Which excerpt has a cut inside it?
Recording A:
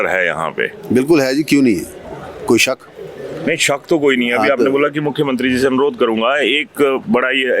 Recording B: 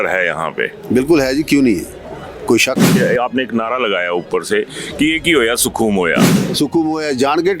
B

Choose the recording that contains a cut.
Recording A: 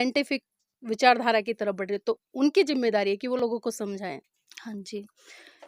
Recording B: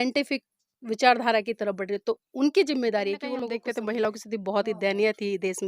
B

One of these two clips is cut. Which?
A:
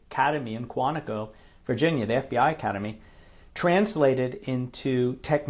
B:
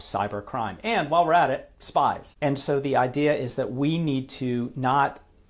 B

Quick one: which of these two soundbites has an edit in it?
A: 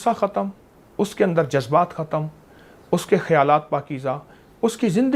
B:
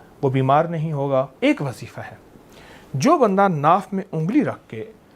B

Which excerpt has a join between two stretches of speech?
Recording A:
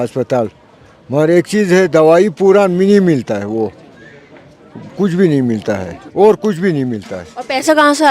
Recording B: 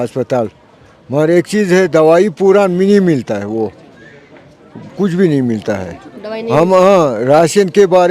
A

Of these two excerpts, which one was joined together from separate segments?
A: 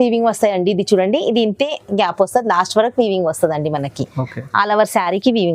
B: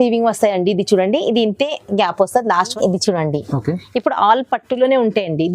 B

